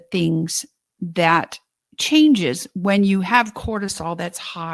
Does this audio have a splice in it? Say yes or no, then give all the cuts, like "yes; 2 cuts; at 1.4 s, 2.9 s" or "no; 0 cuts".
no; 0 cuts